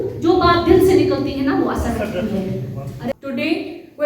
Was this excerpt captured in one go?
no; 1 cut; at 3.1 s

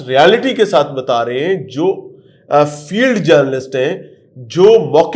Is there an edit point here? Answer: no; 0 cuts

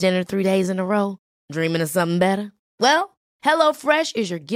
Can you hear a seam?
no; 0 cuts

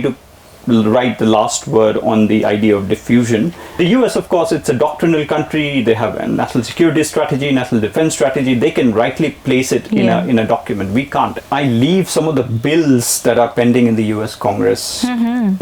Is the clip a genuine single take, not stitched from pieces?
no; 2 cuts; at 3.8 s, 11.4 s

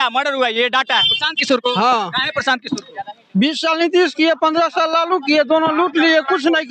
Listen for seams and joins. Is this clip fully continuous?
no; 1 cut; at 1.1 s

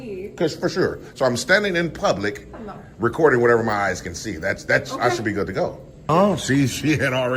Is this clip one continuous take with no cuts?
no; 1 cut; at 6.1 s

